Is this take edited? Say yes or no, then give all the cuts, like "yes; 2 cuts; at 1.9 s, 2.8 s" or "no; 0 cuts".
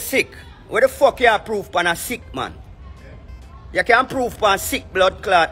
no; 0 cuts